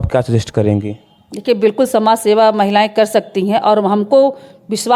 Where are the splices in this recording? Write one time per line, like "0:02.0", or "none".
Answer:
none